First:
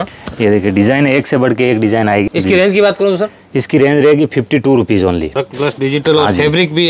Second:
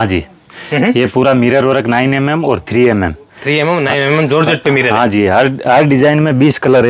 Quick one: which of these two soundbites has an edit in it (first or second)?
first